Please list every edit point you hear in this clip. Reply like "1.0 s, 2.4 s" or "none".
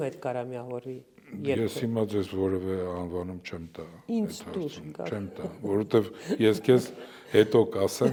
none